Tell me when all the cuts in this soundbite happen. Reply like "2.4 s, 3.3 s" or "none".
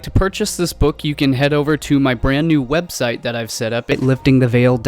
3.9 s